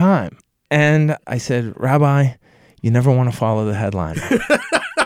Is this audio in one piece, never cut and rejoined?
no; 1 cut; at 1.2 s

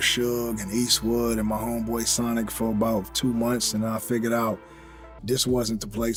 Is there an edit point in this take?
no; 0 cuts

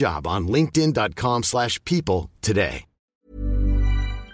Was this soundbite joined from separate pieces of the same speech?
yes; 1 cut; at 3.1 s

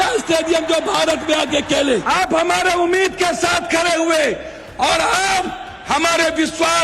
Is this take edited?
yes; 1 cut; at 2.0 s

